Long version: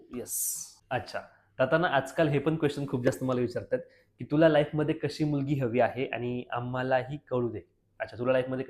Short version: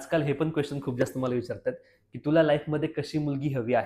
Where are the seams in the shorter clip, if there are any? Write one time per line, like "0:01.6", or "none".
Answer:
none